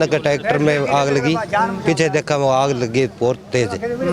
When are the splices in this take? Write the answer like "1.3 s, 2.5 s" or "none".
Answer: none